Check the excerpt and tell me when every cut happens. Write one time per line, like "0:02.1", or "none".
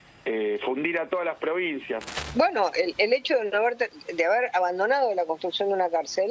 0:02.1